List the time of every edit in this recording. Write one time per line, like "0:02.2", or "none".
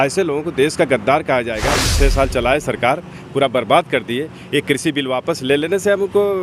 0:01.8